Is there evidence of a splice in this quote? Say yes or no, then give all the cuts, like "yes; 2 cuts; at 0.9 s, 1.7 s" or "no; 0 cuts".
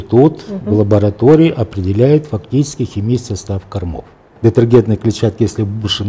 yes; 1 cut; at 4.3 s